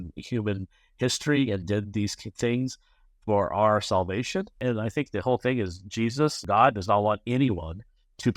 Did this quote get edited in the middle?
yes; 2 cuts; at 4.5 s, 6.4 s

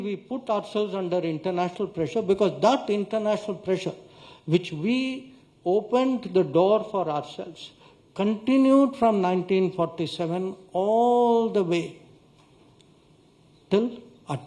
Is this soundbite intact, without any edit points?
yes; 0 cuts

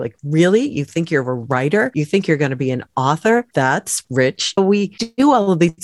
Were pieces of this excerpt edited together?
yes; 2 cuts; at 3.5 s, 4.6 s

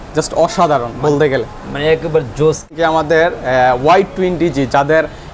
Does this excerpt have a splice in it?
yes; 1 cut; at 2.7 s

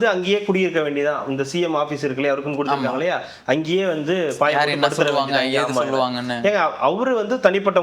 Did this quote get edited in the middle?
no; 0 cuts

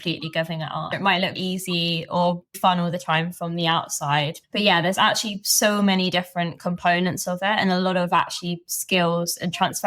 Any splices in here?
yes; 1 cut; at 0.9 s

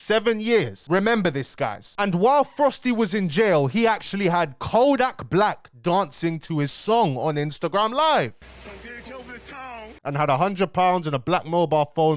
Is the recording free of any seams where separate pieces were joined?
no; 4 cuts; at 0.8 s, 1.8 s, 8.3 s, 10.0 s

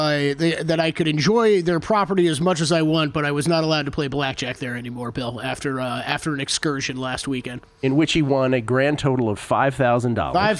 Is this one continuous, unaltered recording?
yes; 0 cuts

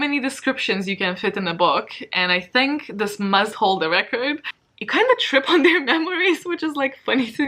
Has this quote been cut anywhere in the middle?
yes; 1 cut; at 4.5 s

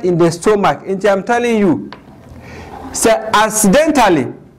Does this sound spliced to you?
no; 0 cuts

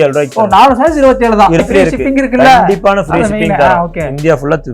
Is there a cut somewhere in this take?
yes; 1 cut; at 1.6 s

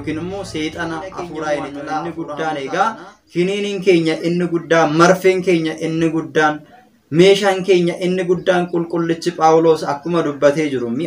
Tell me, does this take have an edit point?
yes; 1 cut; at 2.0 s

